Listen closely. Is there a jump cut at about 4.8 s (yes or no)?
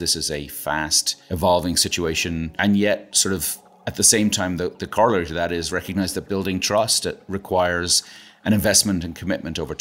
no